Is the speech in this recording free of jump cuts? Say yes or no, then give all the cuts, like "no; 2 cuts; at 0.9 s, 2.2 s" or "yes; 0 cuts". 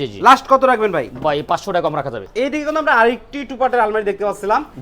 no; 1 cut; at 2.2 s